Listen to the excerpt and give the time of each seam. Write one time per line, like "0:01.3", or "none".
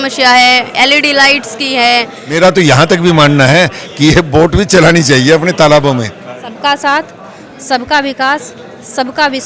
0:02.2
0:06.5